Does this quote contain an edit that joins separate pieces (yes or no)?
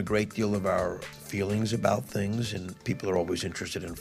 yes